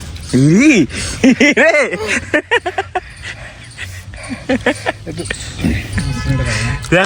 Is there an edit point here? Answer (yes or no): no